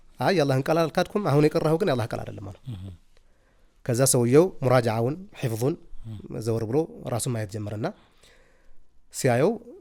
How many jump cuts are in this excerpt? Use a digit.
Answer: 0